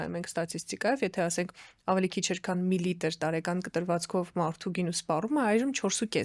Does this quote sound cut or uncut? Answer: uncut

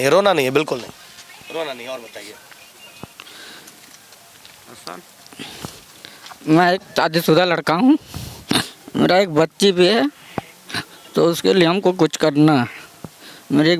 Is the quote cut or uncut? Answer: uncut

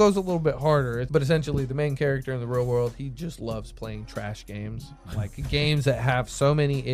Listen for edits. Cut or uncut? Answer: cut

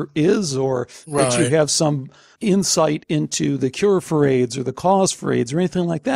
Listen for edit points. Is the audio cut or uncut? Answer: uncut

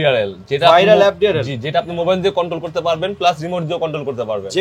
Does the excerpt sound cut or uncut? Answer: uncut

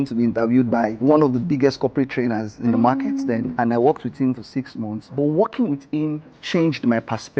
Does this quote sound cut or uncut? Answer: cut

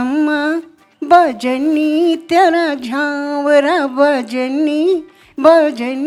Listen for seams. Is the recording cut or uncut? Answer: uncut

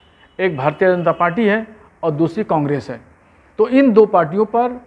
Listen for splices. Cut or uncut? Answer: uncut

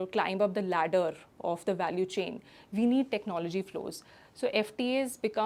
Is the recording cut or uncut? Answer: uncut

